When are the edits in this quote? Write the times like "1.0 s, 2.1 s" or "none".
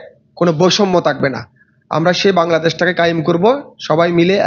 none